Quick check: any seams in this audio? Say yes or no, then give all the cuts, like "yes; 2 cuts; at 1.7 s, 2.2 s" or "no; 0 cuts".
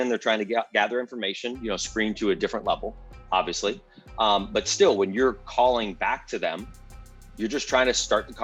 no; 0 cuts